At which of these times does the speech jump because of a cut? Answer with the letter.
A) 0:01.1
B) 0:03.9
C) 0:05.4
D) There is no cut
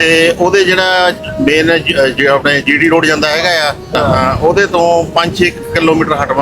B